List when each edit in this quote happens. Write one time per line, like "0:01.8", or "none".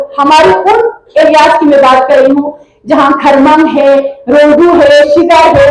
none